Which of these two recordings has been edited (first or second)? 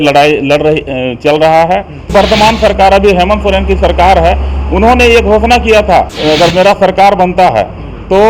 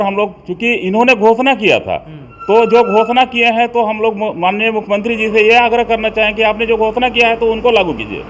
first